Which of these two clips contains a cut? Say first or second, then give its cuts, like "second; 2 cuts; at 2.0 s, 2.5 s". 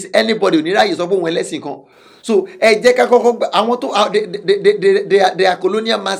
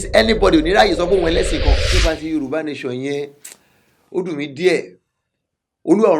second; 1 cut; at 1.9 s